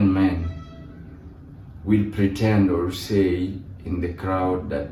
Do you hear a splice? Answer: no; 0 cuts

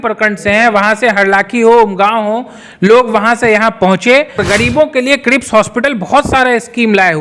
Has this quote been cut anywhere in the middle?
yes; 1 cut; at 4.4 s

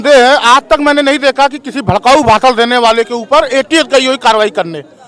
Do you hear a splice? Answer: no; 0 cuts

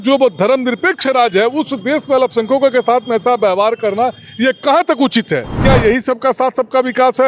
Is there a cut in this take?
yes; 1 cut; at 5.5 s

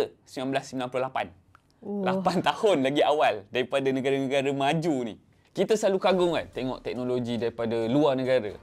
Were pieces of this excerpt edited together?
yes; 1 cut; at 5.3 s

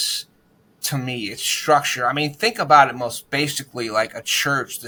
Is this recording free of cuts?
yes; 0 cuts

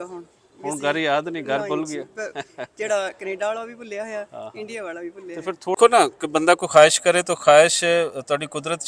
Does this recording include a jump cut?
yes; 1 cut; at 5.8 s

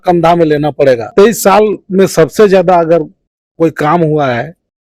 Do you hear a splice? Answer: yes; 1 cut; at 1.1 s

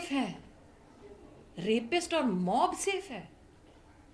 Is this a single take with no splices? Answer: yes; 0 cuts

